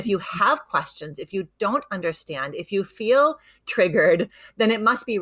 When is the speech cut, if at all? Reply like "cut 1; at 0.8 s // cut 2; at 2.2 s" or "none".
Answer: none